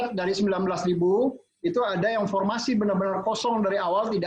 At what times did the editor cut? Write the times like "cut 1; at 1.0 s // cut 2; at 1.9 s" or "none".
none